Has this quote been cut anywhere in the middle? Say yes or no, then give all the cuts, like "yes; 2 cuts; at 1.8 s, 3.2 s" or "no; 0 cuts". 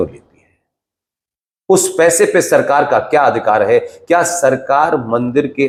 no; 0 cuts